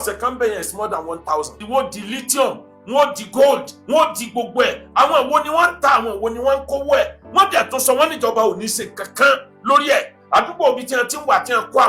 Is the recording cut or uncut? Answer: cut